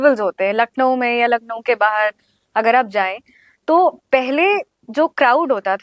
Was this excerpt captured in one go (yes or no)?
yes